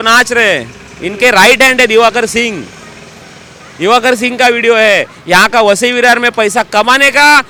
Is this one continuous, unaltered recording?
yes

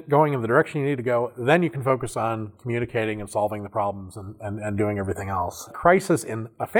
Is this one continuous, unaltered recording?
no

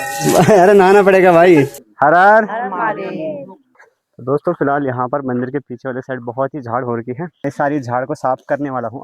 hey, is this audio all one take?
no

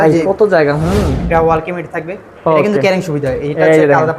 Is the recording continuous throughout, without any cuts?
no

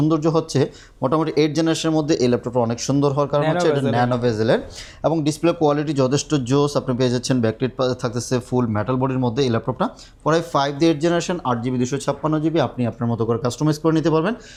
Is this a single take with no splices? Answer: yes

